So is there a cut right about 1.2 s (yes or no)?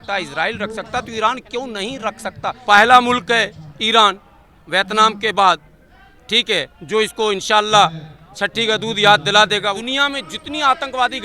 no